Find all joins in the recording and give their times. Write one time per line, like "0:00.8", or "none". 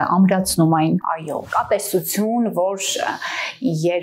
0:01.4